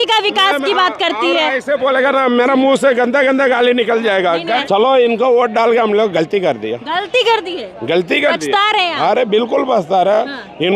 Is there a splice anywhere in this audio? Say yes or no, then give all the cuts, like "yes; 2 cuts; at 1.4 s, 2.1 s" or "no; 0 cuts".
yes; 1 cut; at 4.6 s